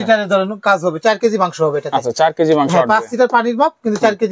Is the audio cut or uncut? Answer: uncut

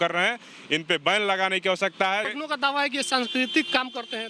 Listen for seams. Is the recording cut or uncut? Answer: cut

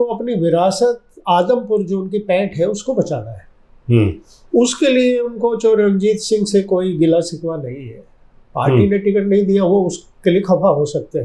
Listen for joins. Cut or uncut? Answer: uncut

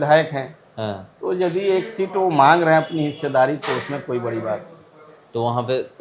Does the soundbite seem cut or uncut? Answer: uncut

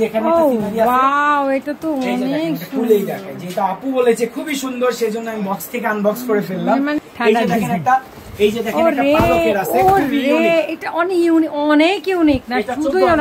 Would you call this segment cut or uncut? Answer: cut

